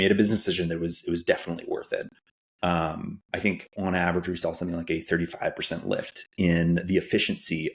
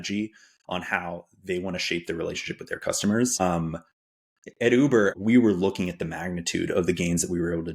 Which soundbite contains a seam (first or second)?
second